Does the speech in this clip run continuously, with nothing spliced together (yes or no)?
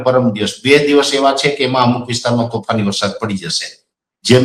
yes